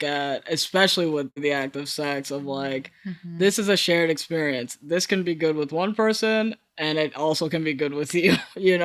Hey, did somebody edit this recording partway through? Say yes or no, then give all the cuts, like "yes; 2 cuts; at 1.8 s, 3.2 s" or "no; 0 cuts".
yes; 1 cut; at 1.4 s